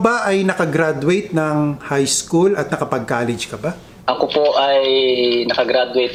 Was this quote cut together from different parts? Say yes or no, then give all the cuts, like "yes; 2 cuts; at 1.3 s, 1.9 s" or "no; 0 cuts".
no; 0 cuts